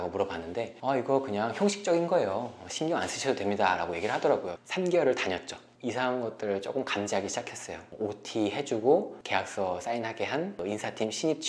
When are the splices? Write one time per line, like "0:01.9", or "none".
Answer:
0:04.5